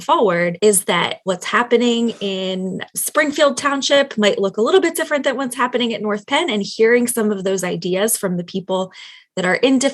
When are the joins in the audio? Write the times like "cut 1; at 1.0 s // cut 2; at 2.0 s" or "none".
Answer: cut 1; at 1.0 s